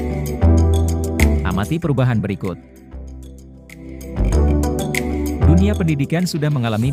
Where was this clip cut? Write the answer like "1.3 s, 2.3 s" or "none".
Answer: none